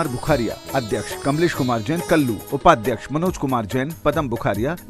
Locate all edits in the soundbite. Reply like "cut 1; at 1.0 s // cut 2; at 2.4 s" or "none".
cut 1; at 1.1 s // cut 2; at 2.4 s

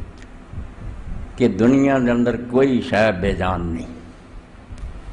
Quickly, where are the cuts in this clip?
none

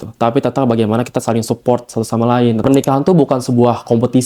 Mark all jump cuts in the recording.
cut 1; at 2.6 s

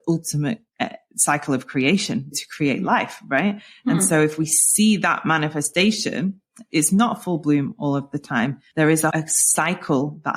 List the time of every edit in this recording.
cut 1; at 8.6 s

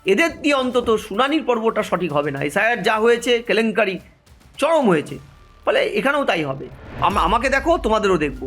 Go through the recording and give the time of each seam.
cut 1; at 7.0 s

